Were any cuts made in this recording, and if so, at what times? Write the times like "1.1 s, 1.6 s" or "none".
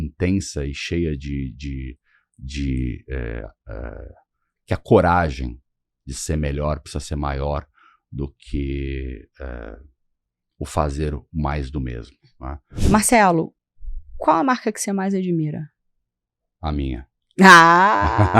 12.7 s